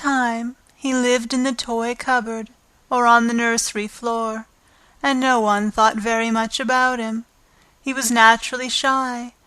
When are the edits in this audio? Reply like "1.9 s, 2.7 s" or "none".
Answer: 2.0 s